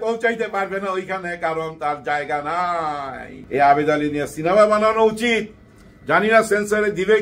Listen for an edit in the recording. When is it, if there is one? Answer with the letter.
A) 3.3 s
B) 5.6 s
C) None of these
A